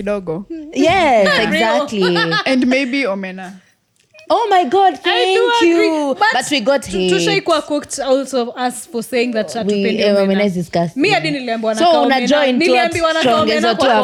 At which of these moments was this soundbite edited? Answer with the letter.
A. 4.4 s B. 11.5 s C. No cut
C